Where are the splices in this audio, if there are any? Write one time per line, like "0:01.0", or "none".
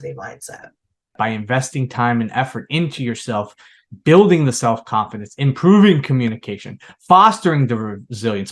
0:01.1